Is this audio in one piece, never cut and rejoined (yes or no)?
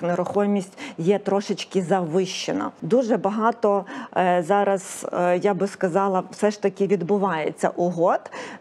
no